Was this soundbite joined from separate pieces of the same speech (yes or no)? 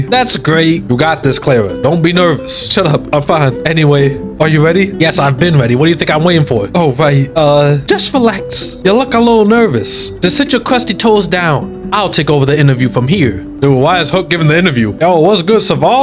yes